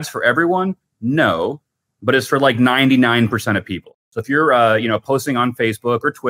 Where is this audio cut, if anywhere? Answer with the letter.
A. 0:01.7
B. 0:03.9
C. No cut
B